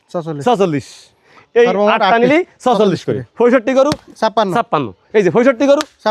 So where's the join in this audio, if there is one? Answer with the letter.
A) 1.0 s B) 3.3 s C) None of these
B